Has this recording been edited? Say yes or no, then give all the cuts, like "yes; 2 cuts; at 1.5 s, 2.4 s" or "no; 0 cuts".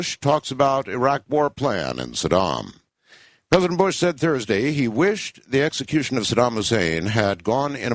yes; 1 cut; at 1.1 s